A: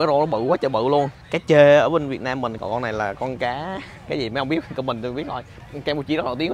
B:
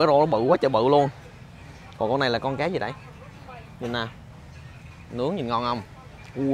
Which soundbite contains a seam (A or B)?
A